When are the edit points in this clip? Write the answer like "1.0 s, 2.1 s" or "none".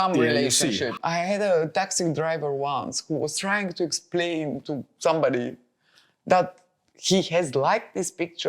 0.9 s